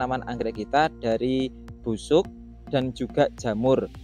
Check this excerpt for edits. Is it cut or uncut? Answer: uncut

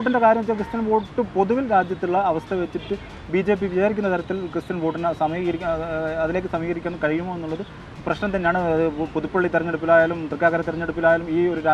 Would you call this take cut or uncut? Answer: uncut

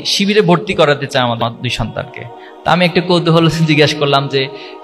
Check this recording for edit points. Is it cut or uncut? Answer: cut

